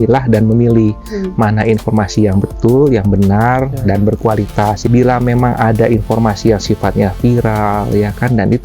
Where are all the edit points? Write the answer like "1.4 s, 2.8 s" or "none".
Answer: 4.9 s

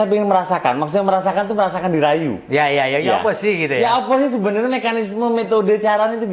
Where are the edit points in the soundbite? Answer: none

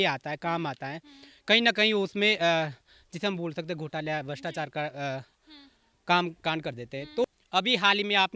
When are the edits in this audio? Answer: 7.2 s

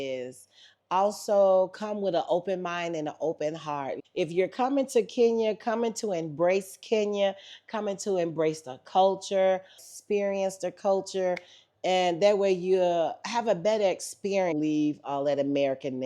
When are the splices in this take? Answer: 3.9 s, 9.9 s, 14.5 s

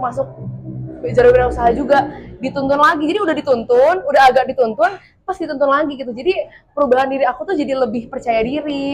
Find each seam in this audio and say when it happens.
none

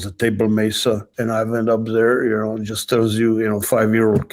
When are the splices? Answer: 1.1 s

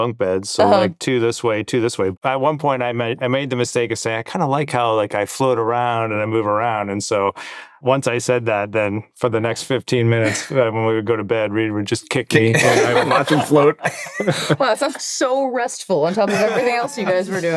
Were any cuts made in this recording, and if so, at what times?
2.1 s, 7.8 s, 14.1 s

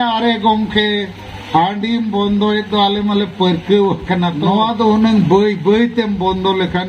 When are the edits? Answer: 4.5 s

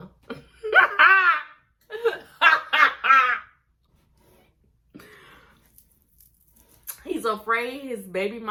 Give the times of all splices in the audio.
none

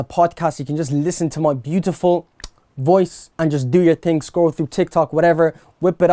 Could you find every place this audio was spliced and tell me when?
3.2 s

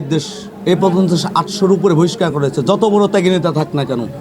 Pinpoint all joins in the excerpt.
none

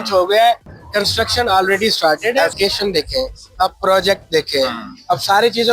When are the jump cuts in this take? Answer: 2.6 s

